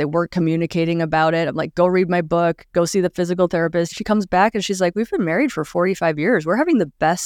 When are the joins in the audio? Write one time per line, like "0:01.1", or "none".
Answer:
0:03.9